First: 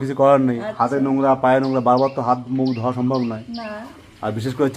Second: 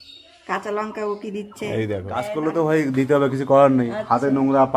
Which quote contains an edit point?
second; 1 cut; at 2.2 s

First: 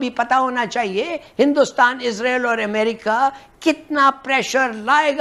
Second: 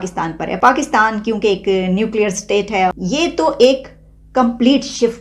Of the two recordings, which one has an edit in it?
second; 1 cut; at 2.8 s

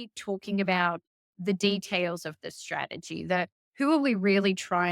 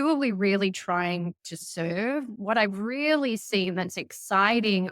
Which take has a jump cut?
second; 1 cut; at 2.3 s

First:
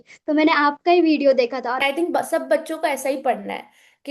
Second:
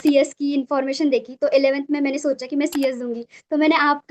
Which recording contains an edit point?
first; 1 cut; at 1.8 s

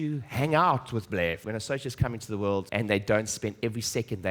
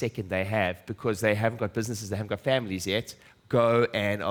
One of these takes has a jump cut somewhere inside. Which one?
first; 2 cuts; at 1.4 s, 2.7 s

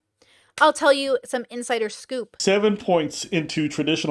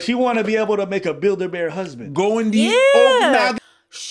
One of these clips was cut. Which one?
first; 1 cut; at 2.3 s

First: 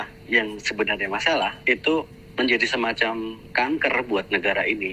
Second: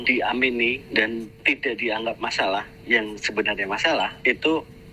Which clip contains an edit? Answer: second; 1 cut; at 1.3 s

